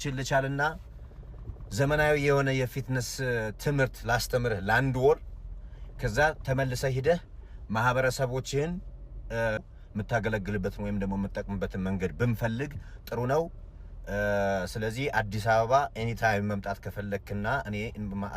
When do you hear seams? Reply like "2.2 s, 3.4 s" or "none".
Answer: none